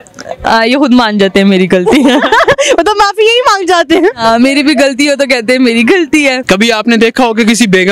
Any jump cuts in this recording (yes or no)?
yes